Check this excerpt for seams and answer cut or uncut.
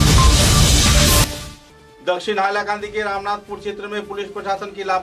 cut